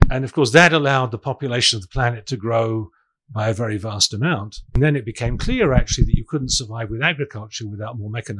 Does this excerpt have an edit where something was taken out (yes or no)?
yes